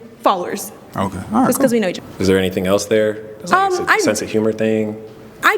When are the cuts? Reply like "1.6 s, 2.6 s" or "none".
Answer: 2.0 s